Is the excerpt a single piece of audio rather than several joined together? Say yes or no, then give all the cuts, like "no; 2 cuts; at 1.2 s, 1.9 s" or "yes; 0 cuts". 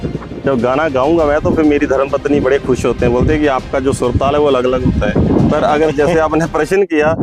yes; 0 cuts